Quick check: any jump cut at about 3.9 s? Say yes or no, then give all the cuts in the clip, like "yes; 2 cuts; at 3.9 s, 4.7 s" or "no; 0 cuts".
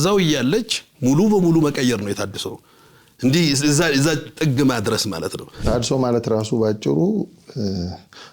no; 1 cut; at 5.6 s